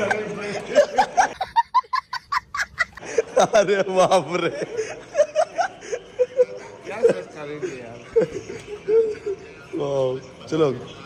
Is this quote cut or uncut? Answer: uncut